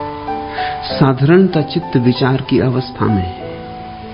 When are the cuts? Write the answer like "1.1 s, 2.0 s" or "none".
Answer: 1.0 s